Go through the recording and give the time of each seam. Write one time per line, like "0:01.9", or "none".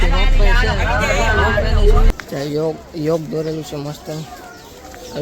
0:02.1